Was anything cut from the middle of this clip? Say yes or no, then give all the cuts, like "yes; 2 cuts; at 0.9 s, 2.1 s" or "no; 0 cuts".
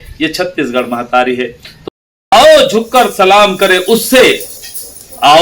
yes; 1 cut; at 1.8 s